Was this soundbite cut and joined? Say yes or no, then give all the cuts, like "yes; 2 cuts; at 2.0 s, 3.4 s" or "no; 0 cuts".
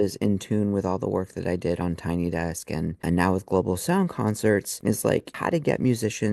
yes; 2 cuts; at 3.0 s, 5.2 s